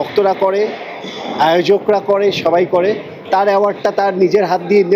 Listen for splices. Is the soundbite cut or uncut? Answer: uncut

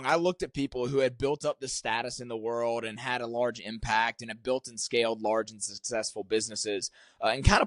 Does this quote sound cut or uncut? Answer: uncut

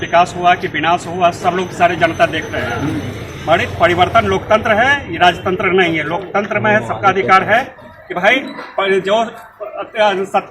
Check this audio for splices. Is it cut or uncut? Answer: uncut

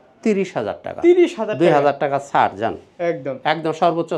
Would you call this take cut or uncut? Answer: uncut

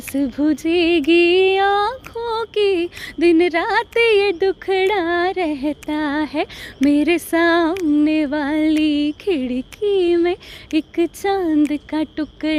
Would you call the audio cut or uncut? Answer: uncut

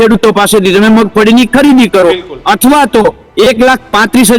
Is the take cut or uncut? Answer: uncut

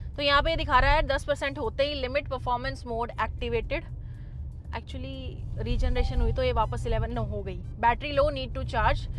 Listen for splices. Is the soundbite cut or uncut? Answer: uncut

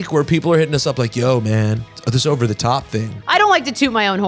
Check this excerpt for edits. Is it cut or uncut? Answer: cut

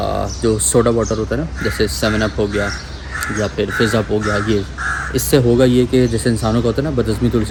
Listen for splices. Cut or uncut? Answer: uncut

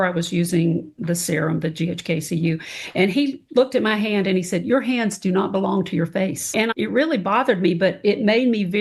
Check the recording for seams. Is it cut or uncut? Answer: uncut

